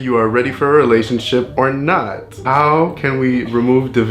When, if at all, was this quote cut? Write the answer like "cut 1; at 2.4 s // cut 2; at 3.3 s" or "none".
cut 1; at 2.4 s